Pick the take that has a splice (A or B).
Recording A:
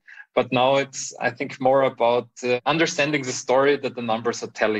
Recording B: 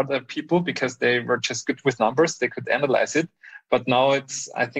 A